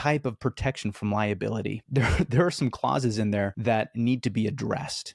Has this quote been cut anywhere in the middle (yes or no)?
yes